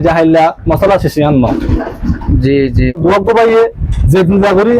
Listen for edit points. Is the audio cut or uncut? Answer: cut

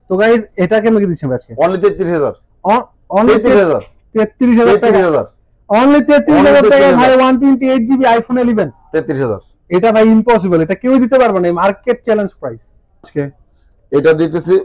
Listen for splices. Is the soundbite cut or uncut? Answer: cut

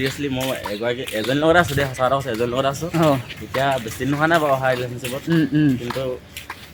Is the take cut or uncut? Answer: uncut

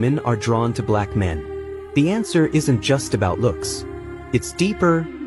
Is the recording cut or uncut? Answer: uncut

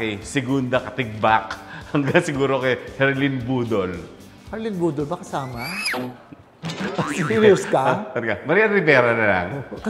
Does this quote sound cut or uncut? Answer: uncut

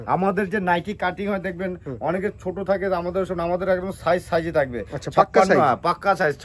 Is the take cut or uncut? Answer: uncut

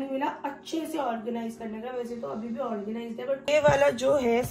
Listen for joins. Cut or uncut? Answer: cut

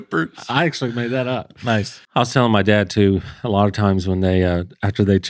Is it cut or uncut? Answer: cut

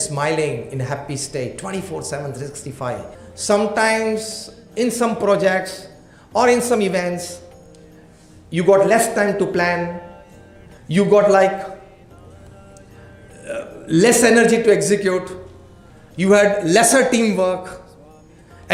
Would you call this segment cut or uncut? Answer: uncut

